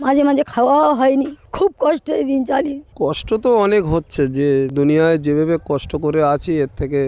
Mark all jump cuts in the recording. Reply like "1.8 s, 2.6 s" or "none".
3.2 s, 4.7 s